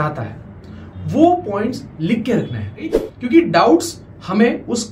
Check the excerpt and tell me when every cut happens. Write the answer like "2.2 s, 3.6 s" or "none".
3.1 s